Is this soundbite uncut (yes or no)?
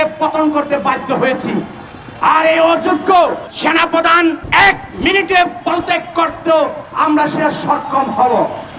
no